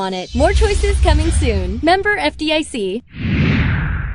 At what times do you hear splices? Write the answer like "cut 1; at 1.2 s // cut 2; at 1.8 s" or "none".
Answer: cut 1; at 3.1 s

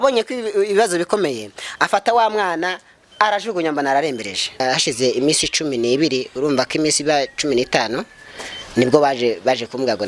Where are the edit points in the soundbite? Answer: cut 1; at 4.6 s

